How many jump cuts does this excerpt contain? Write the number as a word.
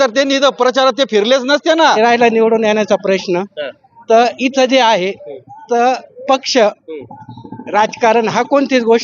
one